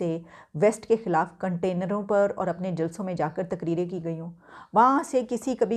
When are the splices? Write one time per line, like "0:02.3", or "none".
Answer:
none